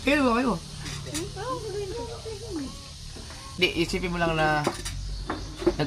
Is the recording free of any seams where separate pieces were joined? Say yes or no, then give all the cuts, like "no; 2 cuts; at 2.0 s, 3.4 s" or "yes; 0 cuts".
no; 1 cut; at 3.5 s